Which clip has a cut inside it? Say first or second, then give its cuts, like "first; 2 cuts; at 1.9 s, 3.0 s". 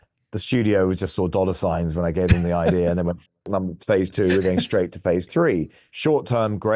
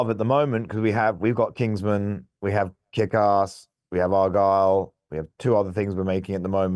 first; 1 cut; at 5.8 s